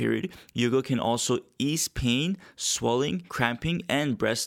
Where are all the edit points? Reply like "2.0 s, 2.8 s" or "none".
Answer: 3.3 s